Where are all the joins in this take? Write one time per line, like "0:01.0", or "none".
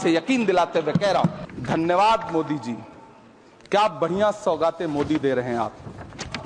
0:01.4